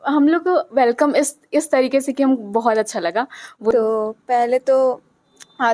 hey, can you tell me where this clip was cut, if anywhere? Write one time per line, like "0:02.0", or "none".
0:03.7